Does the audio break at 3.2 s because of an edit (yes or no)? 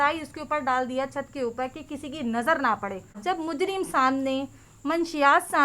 yes